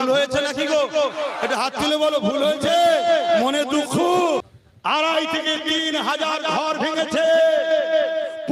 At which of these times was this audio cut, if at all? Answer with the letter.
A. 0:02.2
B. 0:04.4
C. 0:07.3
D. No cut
B